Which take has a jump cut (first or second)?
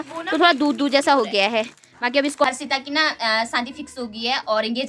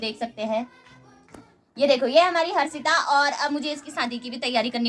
first